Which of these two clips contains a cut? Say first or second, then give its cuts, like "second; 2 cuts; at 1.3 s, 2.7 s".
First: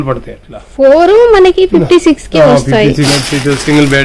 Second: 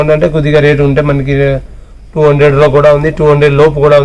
first; 1 cut; at 3.1 s